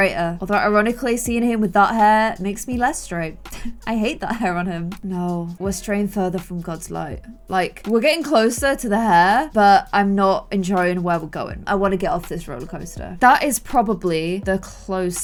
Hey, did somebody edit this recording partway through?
no; 0 cuts

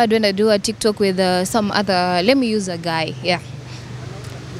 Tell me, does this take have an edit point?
no; 0 cuts

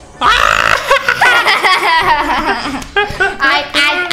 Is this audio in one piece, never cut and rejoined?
yes; 0 cuts

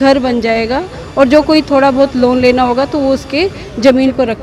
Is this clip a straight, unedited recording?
yes; 0 cuts

